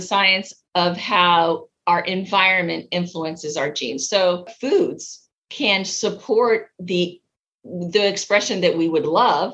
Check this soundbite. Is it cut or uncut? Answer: cut